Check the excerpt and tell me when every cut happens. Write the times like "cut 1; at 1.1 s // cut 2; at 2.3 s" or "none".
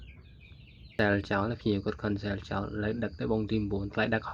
cut 1; at 0.9 s